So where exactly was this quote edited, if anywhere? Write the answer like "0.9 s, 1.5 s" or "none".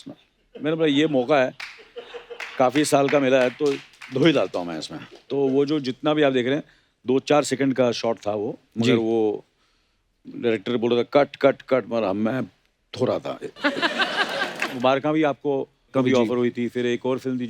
14.8 s